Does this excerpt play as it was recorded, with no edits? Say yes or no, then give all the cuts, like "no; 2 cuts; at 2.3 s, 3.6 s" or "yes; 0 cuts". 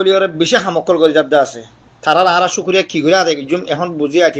yes; 0 cuts